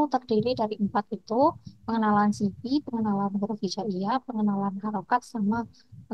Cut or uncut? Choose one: uncut